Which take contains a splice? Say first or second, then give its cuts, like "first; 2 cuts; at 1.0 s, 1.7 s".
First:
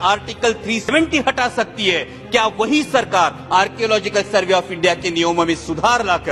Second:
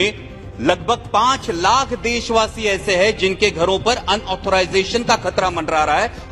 first; 1 cut; at 0.9 s